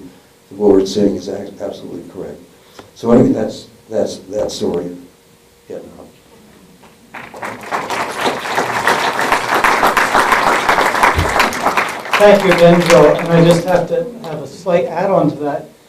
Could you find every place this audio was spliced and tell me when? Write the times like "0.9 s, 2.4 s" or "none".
12.4 s